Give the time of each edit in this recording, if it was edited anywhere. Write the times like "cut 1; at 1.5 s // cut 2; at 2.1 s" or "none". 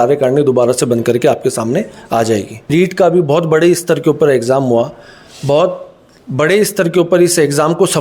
cut 1; at 2.7 s